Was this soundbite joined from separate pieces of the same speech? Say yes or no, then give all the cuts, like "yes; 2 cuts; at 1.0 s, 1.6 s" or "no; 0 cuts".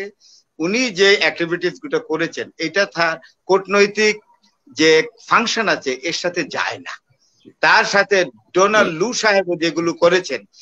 no; 0 cuts